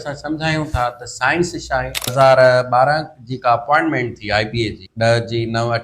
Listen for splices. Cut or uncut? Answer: cut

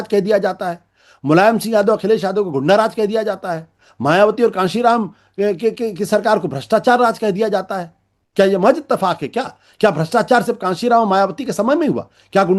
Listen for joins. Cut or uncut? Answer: uncut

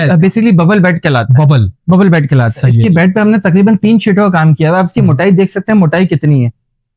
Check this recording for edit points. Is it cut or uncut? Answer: uncut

